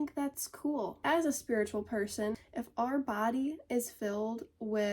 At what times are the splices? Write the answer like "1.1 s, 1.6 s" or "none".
1.0 s, 2.4 s